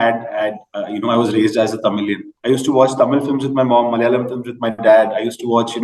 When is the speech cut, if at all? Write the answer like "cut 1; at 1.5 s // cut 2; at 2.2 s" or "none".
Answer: cut 1; at 2.3 s